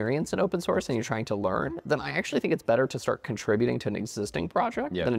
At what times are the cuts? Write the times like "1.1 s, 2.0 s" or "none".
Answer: none